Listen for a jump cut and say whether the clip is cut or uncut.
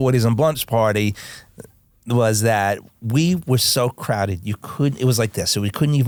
uncut